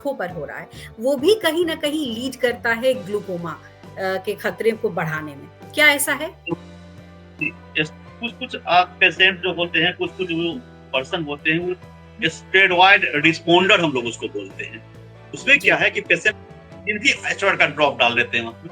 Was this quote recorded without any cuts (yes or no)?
yes